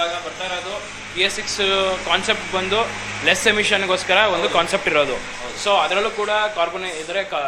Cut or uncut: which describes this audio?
uncut